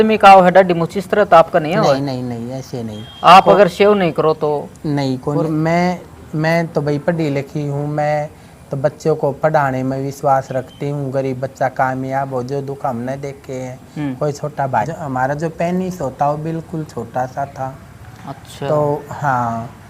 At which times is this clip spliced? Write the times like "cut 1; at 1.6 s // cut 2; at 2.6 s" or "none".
cut 1; at 5.4 s // cut 2; at 14.9 s